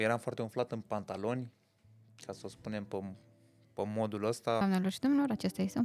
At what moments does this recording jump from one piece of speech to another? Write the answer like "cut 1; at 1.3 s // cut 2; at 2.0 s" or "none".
cut 1; at 4.6 s

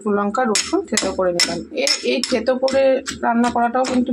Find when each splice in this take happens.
none

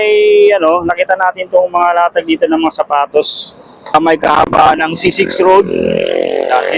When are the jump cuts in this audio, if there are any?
cut 1; at 3.9 s

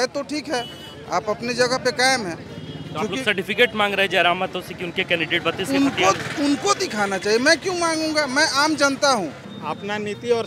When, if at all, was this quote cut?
cut 1; at 9.4 s

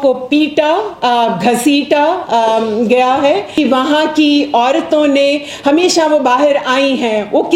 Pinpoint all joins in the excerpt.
cut 1; at 3.5 s

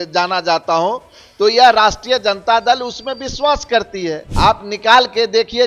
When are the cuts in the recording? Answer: cut 1; at 4.3 s

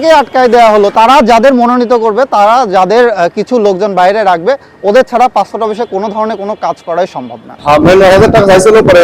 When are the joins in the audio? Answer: cut 1; at 0.9 s // cut 2; at 7.5 s

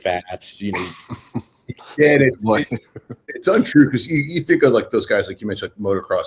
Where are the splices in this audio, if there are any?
none

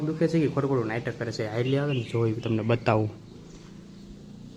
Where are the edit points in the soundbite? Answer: none

